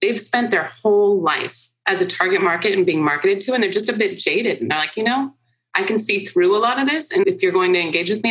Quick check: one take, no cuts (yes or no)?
no